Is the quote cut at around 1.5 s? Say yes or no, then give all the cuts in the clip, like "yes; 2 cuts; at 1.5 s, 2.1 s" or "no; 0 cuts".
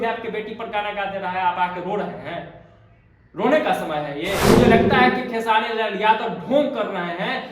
no; 1 cut; at 4.4 s